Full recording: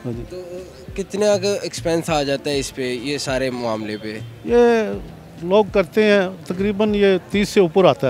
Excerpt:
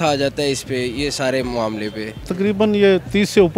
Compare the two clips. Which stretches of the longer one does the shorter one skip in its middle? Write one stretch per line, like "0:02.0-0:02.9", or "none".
0:04.3-0:06.4